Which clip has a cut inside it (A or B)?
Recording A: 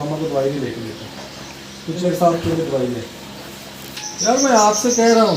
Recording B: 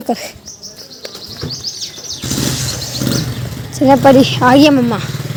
A